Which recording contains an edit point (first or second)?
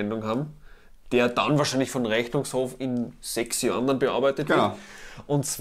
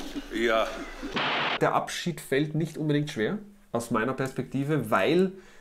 second